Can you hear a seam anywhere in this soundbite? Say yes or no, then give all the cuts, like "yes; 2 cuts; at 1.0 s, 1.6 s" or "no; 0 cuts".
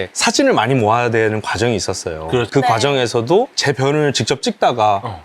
no; 0 cuts